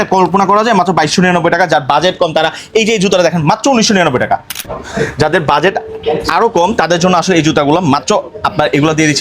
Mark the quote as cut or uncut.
cut